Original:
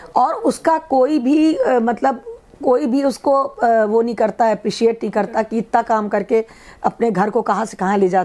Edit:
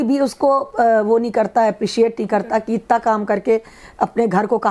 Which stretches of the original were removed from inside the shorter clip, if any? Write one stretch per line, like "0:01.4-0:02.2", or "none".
none